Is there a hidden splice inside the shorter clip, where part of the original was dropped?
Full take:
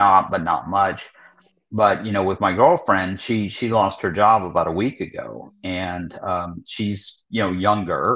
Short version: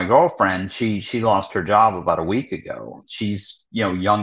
yes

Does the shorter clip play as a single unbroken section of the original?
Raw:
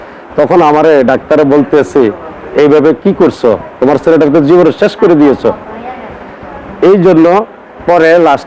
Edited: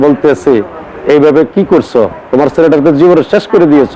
yes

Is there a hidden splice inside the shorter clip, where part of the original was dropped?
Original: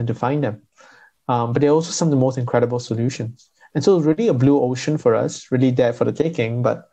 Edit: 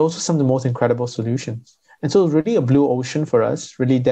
no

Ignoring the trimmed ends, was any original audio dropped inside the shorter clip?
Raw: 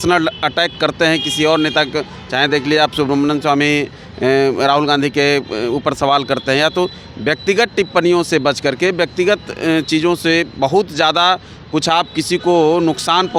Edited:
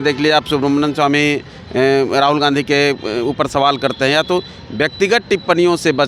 no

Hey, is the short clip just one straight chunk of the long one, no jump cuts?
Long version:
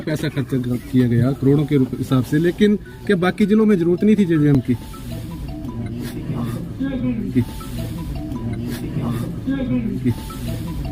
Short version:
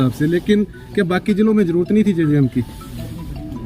no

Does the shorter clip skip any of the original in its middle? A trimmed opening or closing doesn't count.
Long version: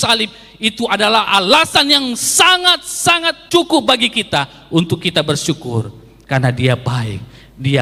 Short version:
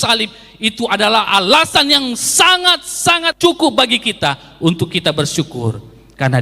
yes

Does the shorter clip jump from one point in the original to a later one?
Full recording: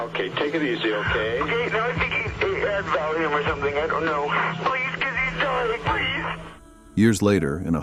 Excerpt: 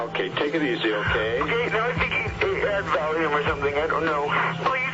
no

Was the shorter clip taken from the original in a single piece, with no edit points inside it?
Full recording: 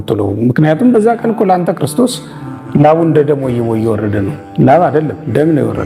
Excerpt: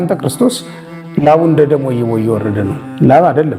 yes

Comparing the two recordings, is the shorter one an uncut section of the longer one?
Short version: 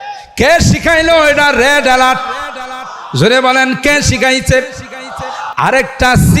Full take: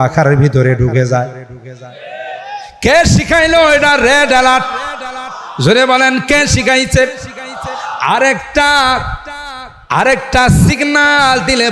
no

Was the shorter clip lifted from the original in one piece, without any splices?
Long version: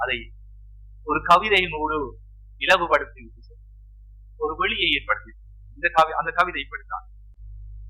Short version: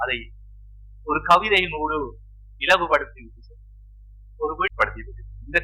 no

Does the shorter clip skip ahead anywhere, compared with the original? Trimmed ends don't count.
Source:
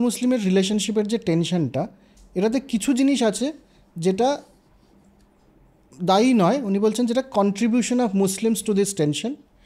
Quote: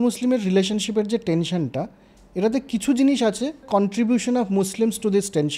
yes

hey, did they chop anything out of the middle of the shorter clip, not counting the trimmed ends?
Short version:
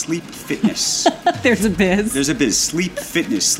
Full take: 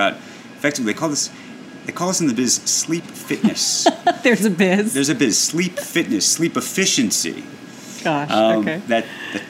no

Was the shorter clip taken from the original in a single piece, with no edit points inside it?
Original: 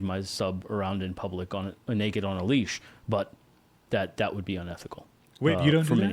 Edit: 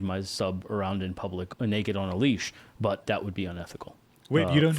no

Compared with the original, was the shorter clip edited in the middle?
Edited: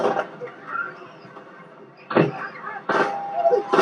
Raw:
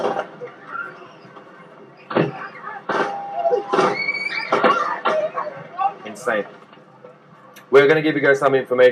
no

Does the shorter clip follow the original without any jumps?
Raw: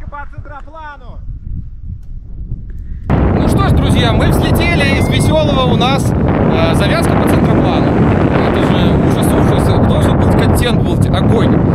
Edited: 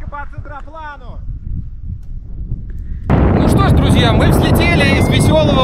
yes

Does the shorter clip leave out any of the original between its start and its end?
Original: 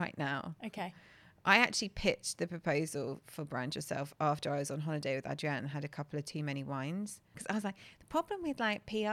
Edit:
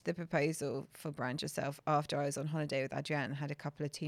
no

